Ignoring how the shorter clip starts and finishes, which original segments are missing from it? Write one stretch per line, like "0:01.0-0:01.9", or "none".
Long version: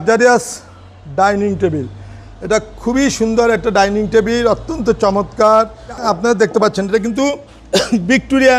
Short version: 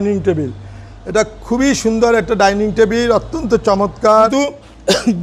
0:05.7-0:07.2